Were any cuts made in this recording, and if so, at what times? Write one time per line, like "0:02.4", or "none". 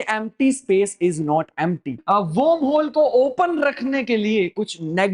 0:02.0